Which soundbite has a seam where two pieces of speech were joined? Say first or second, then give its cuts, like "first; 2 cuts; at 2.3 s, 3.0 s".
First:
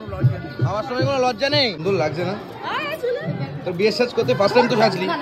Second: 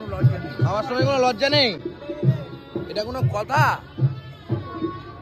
first; 1 cut; at 1.8 s